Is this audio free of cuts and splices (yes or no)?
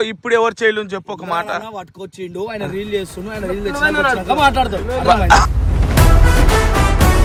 yes